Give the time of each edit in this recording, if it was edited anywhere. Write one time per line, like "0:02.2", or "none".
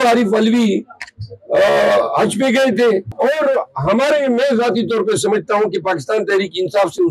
0:03.1